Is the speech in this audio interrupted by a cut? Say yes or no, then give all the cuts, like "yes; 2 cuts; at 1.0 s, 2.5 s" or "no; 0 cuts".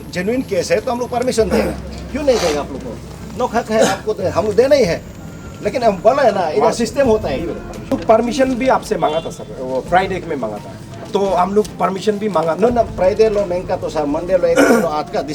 yes; 1 cut; at 7.9 s